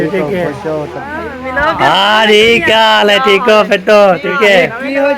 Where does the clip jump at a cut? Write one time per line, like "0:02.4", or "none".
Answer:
0:01.0
0:04.3